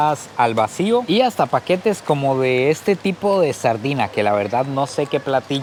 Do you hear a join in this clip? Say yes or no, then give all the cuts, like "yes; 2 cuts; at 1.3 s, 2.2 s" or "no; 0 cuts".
no; 0 cuts